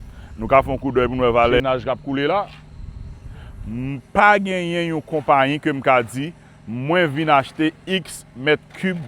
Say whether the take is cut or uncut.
cut